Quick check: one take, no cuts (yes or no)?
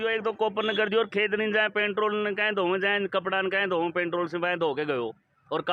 yes